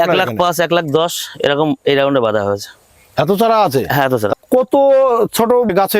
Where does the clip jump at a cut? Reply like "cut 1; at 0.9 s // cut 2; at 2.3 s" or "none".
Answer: cut 1; at 4.3 s